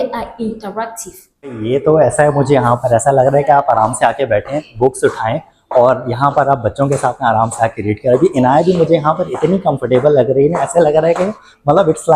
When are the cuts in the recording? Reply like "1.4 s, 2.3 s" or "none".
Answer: 1.6 s

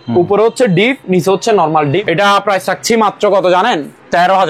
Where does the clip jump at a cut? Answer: 2.0 s

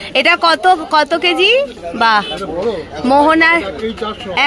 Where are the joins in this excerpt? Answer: 1.8 s

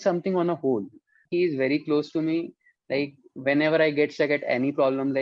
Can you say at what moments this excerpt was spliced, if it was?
1.2 s

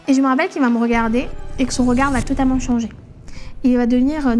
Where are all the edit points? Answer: none

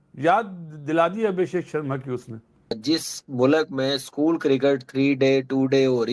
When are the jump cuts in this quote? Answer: 2.8 s

